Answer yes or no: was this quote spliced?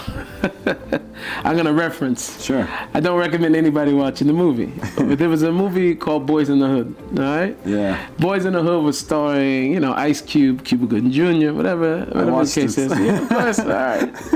no